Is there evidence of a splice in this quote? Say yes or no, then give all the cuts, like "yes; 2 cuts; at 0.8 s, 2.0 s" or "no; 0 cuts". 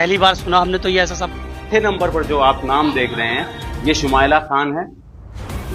yes; 1 cut; at 1.7 s